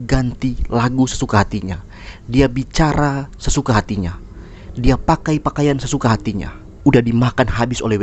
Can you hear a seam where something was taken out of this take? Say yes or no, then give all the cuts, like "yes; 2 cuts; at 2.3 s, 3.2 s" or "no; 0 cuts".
yes; 1 cut; at 6.8 s